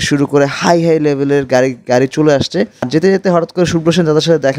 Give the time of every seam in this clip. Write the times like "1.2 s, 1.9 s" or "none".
none